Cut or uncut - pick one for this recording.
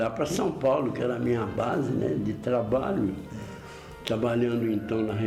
uncut